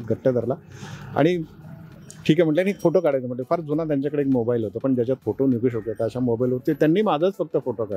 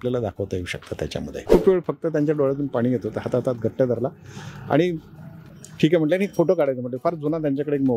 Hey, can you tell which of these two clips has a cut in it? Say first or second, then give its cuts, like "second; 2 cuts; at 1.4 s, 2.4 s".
second; 1 cut; at 1.4 s